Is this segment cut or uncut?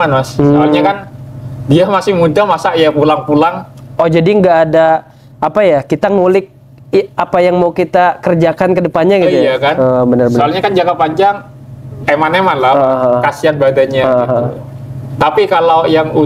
uncut